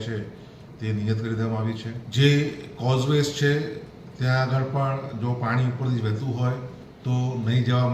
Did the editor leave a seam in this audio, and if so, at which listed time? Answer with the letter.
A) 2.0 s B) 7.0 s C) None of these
A